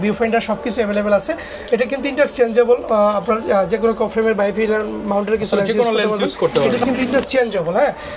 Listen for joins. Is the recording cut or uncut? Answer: cut